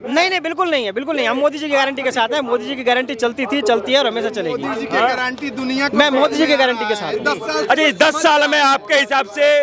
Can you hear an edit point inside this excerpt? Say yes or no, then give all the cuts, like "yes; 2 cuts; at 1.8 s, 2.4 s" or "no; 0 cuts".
no; 0 cuts